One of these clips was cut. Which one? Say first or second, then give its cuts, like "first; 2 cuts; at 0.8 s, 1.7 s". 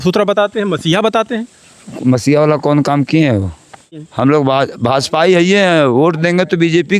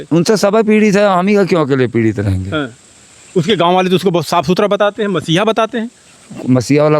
first; 1 cut; at 4.0 s